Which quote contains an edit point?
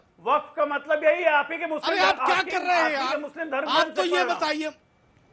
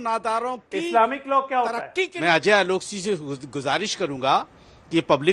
second; 1 cut; at 2.1 s

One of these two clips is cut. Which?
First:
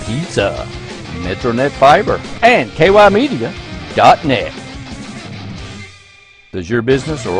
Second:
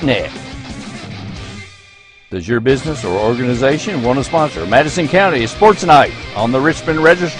first; 1 cut; at 2.3 s

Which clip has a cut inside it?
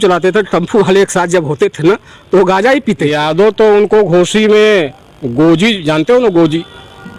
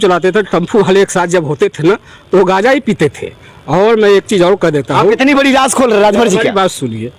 first; 1 cut; at 3.1 s

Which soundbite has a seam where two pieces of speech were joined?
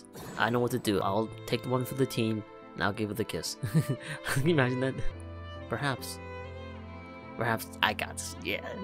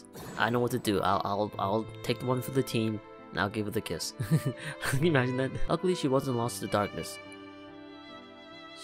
first; 2 cuts; at 1.0 s, 5.1 s

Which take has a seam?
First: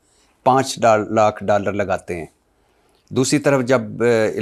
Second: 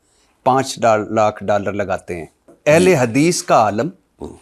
second; 1 cut; at 2.5 s

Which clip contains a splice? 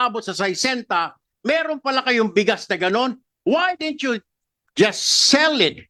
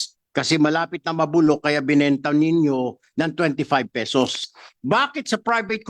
second; 1 cut; at 4.4 s

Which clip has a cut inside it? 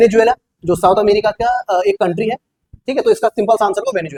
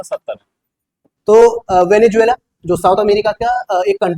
second; 1 cut; at 1.1 s

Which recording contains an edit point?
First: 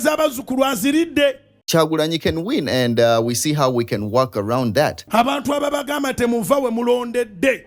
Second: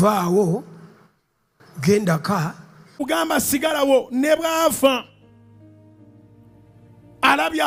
first; 2 cuts; at 1.6 s, 5.0 s

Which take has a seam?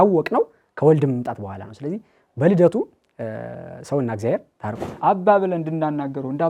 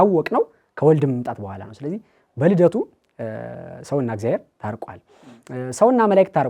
first; 1 cut; at 4.9 s

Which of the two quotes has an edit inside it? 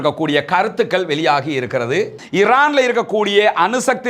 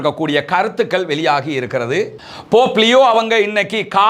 first; 1 cut; at 2.2 s

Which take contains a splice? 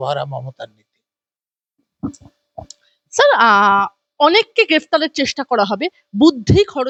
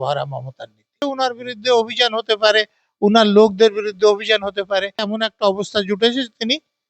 second; 2 cuts; at 1.1 s, 5.1 s

